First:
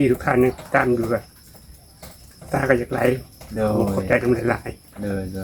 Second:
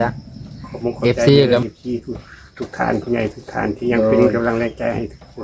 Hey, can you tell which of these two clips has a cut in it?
second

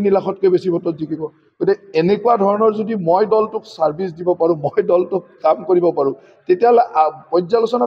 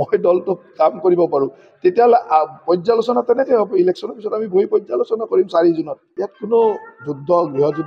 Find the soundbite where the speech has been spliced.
second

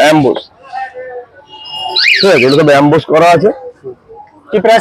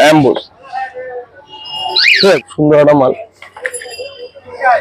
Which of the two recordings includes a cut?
second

